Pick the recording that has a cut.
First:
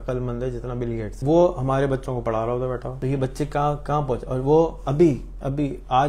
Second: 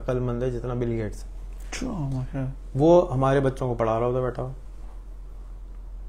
first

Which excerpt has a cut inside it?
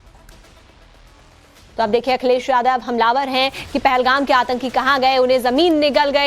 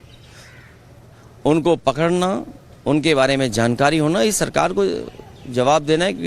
first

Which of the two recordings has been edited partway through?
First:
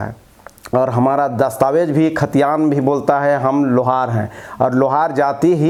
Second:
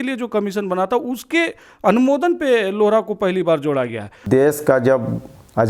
second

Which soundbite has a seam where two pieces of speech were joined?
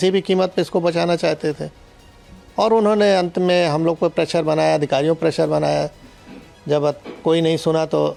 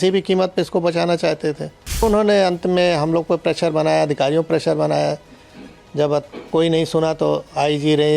second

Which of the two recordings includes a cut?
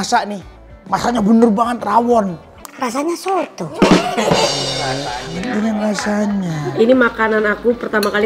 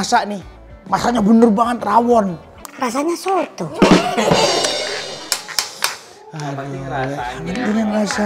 first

